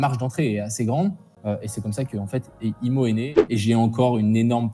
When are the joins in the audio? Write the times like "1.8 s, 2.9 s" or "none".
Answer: 1.3 s, 3.3 s